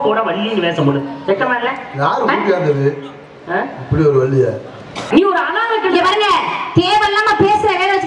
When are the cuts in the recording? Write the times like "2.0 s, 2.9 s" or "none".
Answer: 5.1 s